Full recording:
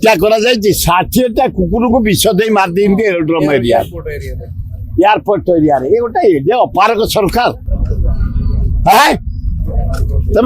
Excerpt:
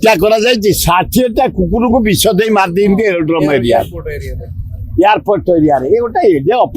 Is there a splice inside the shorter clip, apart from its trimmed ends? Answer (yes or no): no